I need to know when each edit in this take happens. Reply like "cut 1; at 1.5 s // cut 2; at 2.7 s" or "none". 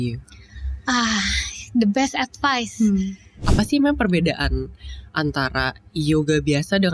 cut 1; at 3.4 s

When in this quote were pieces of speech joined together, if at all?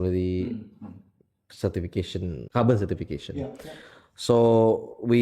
cut 1; at 2.4 s

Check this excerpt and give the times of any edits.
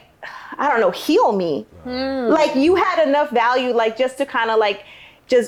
none

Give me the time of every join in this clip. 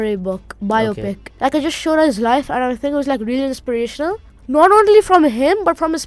cut 1; at 1.3 s // cut 2; at 4.3 s

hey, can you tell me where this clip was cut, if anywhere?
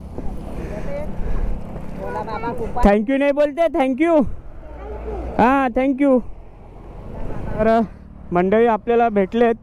cut 1; at 7.6 s

